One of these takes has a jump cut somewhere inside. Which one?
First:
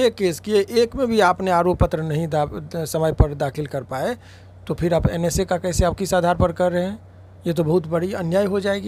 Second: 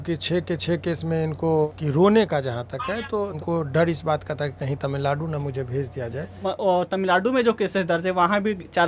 second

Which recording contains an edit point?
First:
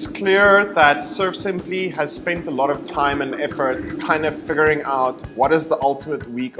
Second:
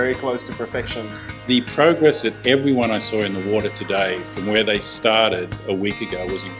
second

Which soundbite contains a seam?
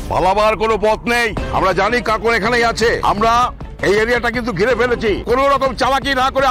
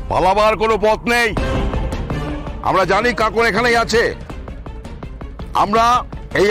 first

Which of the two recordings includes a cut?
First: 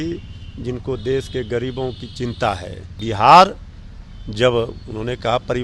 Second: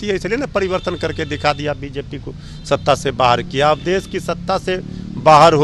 first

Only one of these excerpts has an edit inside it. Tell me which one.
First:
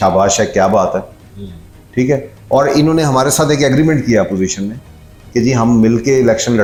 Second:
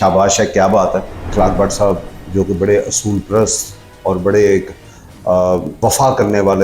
second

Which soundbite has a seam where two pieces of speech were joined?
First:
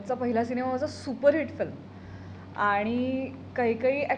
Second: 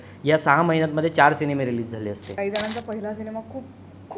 second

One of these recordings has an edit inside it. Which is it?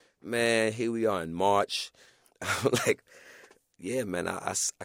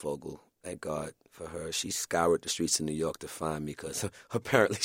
first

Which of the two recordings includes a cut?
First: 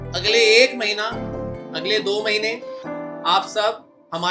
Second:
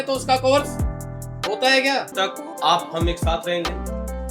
second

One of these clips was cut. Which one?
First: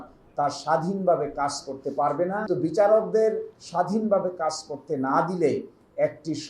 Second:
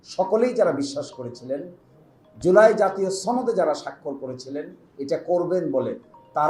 first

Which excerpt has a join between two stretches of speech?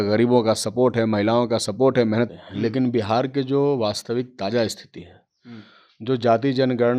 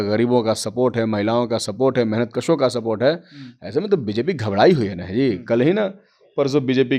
first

